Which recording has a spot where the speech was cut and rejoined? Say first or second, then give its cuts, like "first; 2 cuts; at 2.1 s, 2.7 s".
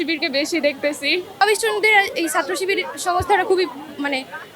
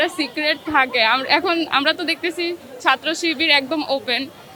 first; 1 cut; at 1.3 s